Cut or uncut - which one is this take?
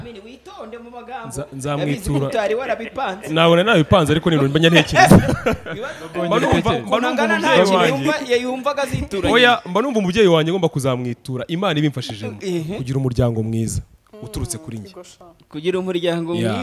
uncut